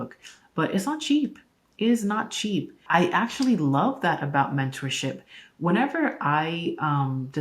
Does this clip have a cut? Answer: yes; 1 cut; at 2.8 s

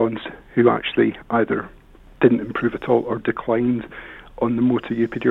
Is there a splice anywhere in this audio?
no; 0 cuts

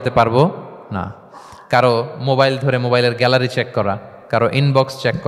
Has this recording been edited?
yes; 1 cut; at 4.1 s

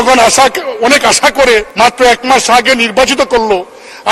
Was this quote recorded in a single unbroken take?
no; 1 cut; at 1.7 s

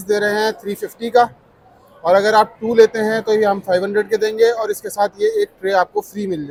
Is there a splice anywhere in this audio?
no; 0 cuts

